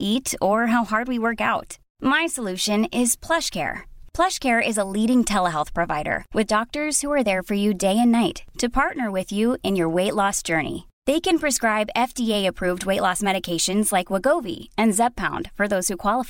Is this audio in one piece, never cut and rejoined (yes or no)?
yes